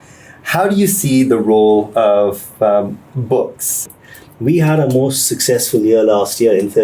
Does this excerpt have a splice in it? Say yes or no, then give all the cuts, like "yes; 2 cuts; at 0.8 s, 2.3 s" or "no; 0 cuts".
yes; 1 cut; at 3.8 s